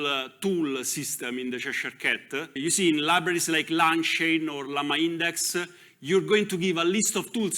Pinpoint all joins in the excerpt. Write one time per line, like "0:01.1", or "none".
0:02.6